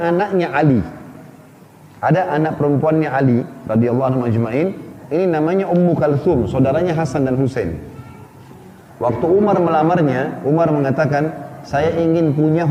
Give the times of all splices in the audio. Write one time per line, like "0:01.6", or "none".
none